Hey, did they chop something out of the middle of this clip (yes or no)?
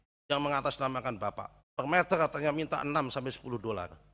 yes